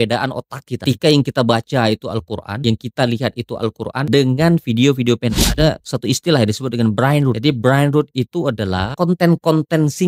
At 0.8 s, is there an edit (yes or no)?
yes